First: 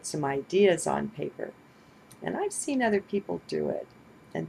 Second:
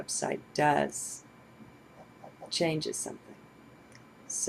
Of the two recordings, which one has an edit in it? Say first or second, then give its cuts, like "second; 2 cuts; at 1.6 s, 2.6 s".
second; 1 cut; at 2.5 s